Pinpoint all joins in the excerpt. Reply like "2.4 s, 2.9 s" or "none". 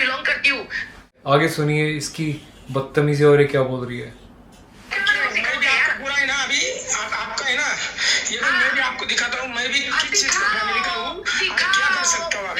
1.2 s